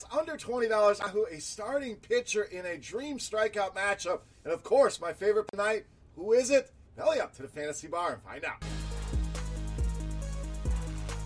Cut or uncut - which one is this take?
cut